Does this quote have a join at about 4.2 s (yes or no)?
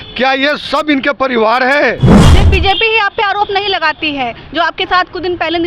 no